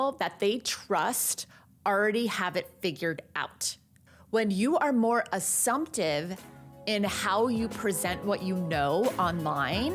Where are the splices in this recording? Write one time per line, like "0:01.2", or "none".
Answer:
none